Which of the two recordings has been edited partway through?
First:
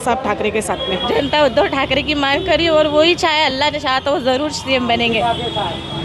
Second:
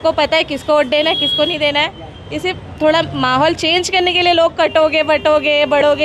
first; 1 cut; at 1.0 s

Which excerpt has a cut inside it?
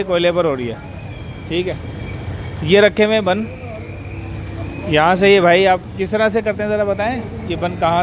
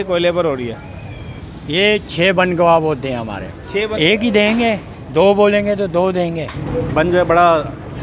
second; 3 cuts; at 1.3 s, 3.9 s, 6.6 s

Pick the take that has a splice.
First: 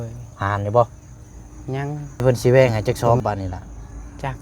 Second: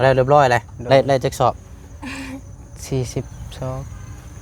first; 1 cut; at 2.2 s

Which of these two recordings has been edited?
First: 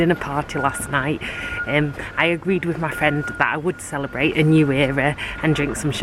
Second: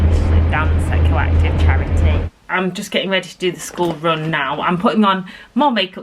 second; 1 cut; at 2.2 s

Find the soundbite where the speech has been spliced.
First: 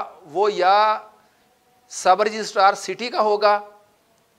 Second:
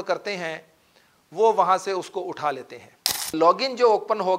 second; 1 cut; at 3.3 s

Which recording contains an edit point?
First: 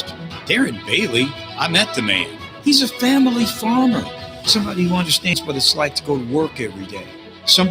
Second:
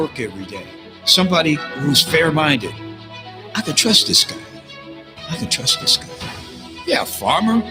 first; 1 cut; at 5.4 s

